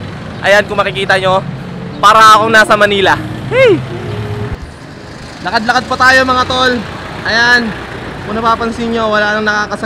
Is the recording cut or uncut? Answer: uncut